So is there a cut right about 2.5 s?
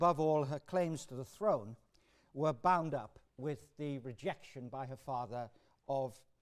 yes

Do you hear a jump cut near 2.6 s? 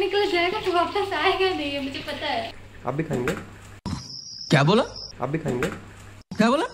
yes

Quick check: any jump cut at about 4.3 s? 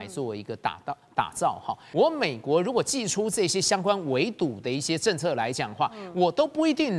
no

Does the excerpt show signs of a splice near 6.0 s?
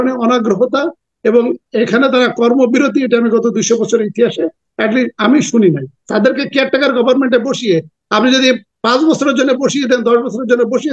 yes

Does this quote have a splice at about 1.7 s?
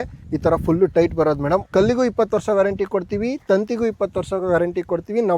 yes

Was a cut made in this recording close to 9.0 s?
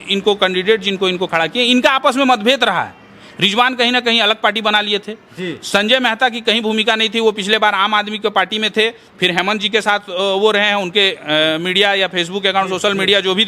no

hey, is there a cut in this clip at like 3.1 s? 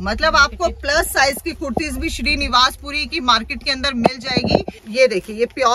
no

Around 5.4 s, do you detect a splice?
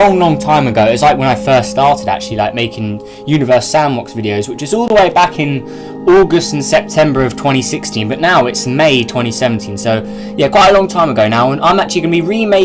no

